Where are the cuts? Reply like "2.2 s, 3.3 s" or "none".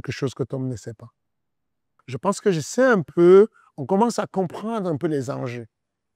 none